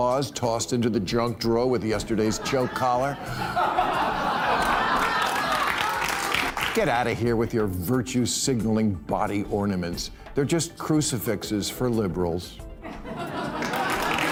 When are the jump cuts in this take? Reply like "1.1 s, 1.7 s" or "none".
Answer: none

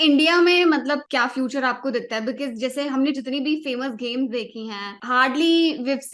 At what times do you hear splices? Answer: 1.0 s, 4.9 s

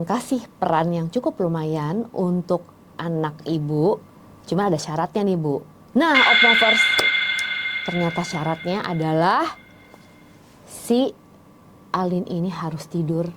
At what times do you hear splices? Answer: none

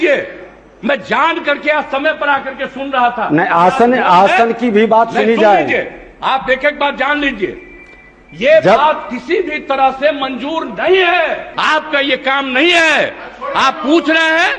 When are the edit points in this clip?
11.5 s

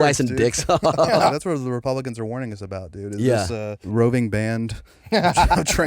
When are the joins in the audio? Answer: 1.3 s, 3.8 s

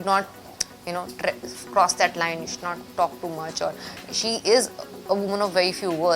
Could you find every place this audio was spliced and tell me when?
none

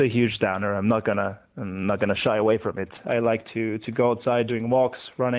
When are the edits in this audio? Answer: 3.0 s, 4.5 s

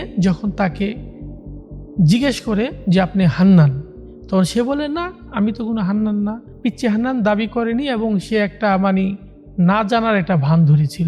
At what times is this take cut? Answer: 2.8 s, 5.2 s, 6.5 s

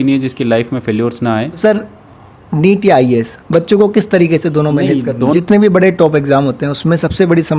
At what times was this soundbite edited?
1.6 s, 5.3 s

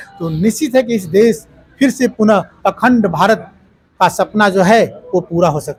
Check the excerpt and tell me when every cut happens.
none

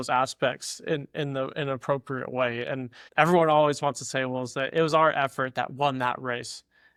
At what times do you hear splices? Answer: none

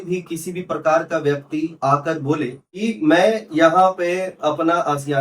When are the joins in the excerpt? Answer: 2.8 s

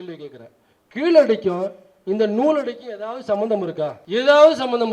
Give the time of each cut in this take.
4.0 s

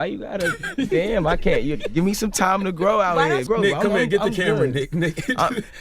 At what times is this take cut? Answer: 3.4 s

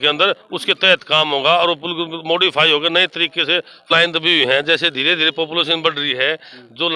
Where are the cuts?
3.9 s

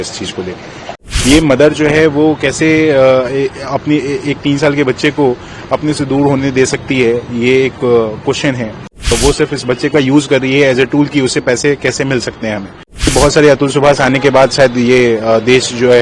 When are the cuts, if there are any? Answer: 0.9 s, 9.1 s, 13.1 s

